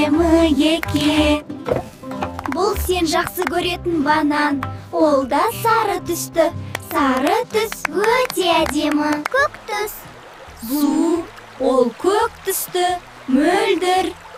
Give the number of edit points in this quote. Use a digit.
0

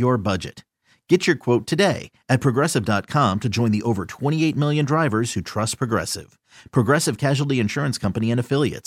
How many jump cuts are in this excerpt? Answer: 0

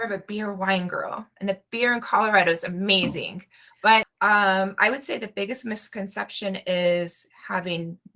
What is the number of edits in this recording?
1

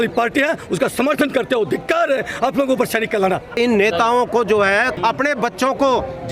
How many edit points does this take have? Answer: 2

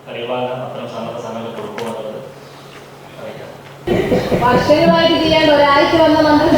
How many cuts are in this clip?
1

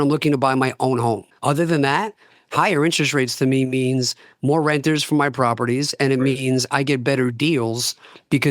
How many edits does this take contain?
1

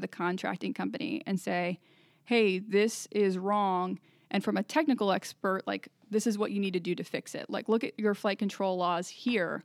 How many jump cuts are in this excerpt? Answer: 0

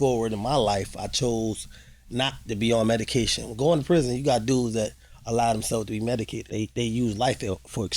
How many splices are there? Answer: 1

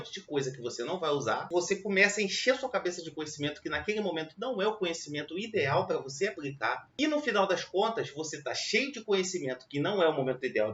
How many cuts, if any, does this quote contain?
2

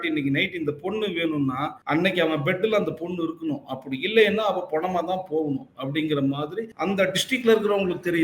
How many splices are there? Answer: 2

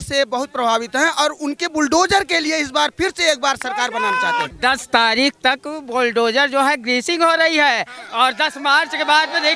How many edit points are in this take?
1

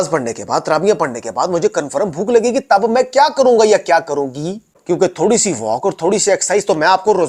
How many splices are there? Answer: 0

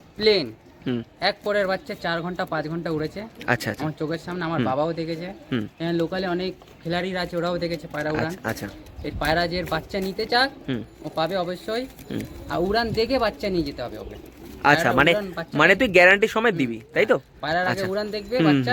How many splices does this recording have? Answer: 0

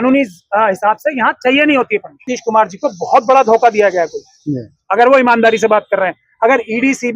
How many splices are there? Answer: 1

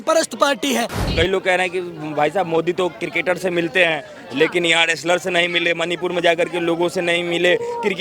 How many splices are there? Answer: 1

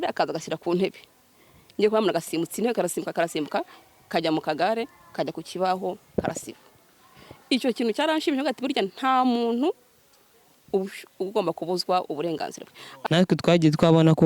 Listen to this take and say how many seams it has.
1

